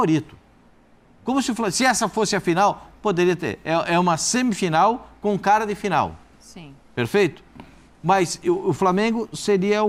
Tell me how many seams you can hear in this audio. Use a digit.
0